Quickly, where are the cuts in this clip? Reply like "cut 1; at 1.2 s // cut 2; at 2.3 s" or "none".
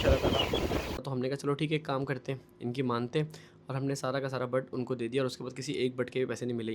cut 1; at 0.9 s